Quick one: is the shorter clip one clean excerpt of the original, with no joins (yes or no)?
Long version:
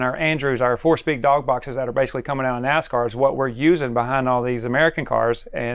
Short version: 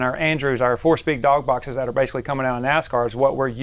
yes